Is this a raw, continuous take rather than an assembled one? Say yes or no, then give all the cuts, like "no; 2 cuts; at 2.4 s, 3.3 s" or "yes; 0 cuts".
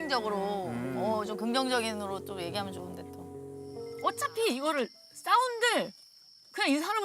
no; 1 cut; at 4.0 s